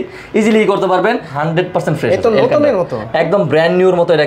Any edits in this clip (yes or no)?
yes